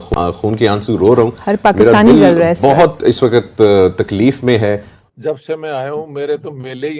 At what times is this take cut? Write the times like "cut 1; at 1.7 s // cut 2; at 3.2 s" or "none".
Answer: cut 1; at 5.0 s